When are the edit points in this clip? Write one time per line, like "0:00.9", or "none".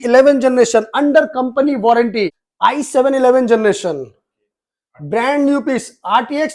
0:02.4